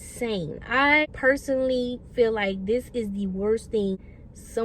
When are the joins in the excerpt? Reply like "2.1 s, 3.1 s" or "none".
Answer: 1.0 s